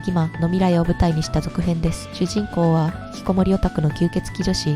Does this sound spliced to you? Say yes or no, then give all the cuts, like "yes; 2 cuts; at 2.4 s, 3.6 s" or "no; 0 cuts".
yes; 1 cut; at 2.0 s